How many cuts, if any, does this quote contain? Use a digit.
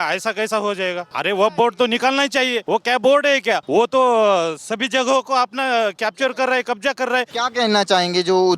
4